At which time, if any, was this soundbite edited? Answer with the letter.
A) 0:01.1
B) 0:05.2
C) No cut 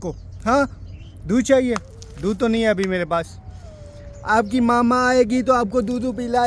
C